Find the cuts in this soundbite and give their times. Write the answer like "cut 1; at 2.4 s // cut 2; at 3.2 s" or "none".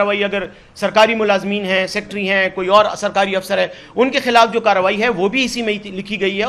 none